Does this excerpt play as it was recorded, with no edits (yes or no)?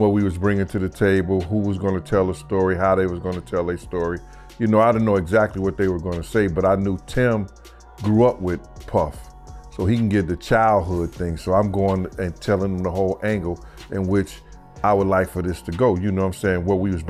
yes